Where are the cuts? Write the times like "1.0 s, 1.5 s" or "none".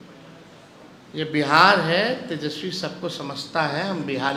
none